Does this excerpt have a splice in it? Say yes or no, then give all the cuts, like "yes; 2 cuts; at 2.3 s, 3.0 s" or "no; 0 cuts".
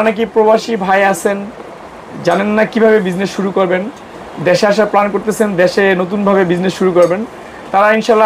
no; 0 cuts